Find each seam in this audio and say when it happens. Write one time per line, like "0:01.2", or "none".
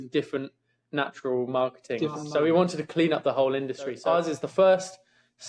0:02.2
0:04.0

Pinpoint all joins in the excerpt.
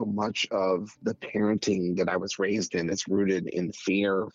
0:00.9

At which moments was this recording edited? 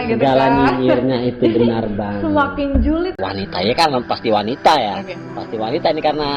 0:03.2

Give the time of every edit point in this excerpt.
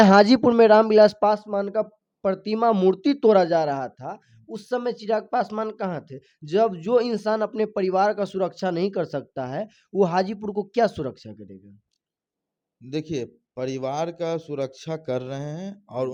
none

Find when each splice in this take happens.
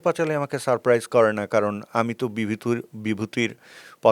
none

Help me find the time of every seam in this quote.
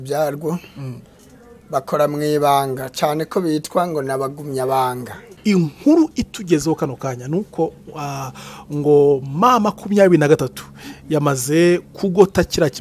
0:05.3

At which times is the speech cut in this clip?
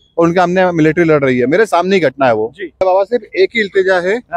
0:02.8

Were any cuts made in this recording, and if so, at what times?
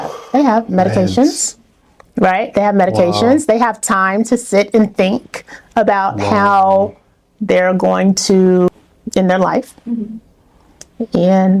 0:08.7

